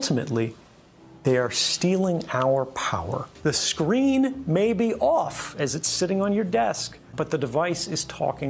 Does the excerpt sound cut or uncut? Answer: cut